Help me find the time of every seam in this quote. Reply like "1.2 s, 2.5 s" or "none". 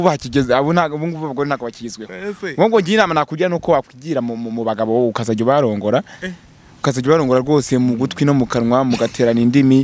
none